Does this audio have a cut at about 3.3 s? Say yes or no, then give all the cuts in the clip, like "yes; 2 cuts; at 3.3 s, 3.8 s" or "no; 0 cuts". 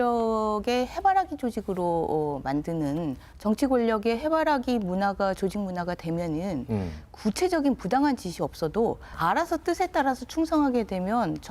yes; 2 cuts; at 3.3 s, 9.1 s